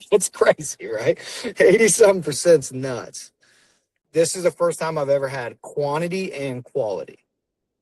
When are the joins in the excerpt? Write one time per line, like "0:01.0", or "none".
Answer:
0:04.0